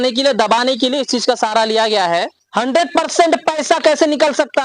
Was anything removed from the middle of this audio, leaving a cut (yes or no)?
yes